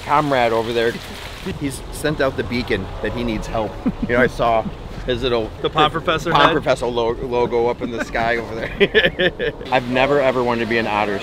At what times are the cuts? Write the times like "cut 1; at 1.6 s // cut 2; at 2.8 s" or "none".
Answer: cut 1; at 1.0 s // cut 2; at 9.5 s

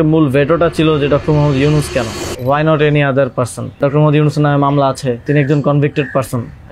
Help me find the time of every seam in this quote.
cut 1; at 2.2 s // cut 2; at 3.8 s // cut 3; at 5.2 s

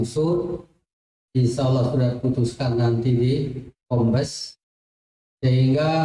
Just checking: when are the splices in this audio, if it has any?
none

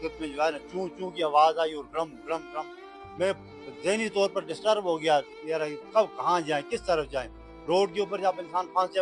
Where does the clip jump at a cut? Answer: none

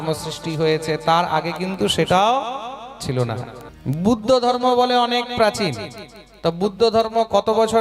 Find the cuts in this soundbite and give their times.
cut 1; at 3.6 s

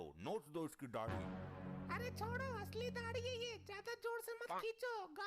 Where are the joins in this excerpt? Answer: none

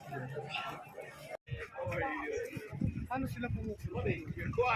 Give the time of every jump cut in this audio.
cut 1; at 1.4 s

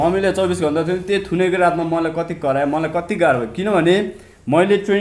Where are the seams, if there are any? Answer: none

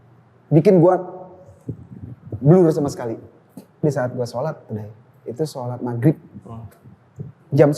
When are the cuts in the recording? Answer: cut 1; at 3.8 s

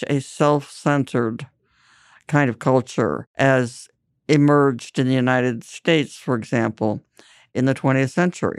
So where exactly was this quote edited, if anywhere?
cut 1; at 3.2 s

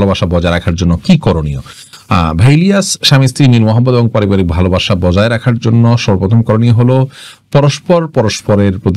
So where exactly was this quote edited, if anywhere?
none

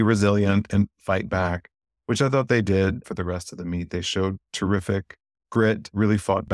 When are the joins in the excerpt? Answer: none

